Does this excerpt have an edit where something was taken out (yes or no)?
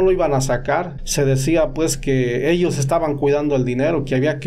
yes